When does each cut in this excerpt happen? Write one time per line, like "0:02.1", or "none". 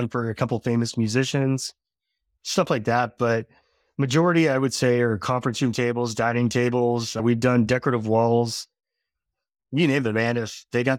0:07.2